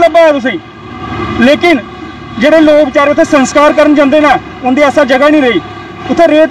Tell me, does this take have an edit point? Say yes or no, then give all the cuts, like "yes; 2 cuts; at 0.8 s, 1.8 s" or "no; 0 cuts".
no; 0 cuts